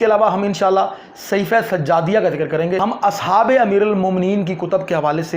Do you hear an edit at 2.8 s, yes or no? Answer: yes